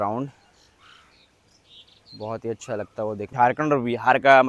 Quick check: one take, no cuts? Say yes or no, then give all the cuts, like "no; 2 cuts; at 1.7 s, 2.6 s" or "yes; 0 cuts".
no; 1 cut; at 3.3 s